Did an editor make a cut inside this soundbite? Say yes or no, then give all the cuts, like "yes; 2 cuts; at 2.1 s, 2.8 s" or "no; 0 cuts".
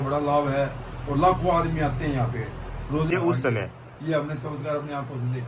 yes; 1 cut; at 3.1 s